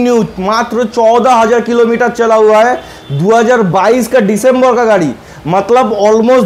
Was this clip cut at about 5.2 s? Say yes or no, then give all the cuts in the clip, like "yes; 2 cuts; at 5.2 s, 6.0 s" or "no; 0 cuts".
no; 0 cuts